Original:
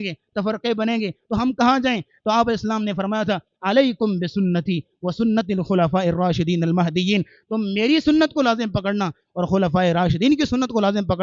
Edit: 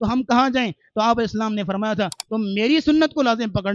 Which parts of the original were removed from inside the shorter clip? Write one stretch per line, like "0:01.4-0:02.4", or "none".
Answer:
0:03.5-0:07.4